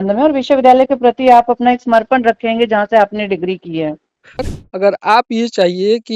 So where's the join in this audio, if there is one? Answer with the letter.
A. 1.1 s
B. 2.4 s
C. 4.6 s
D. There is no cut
C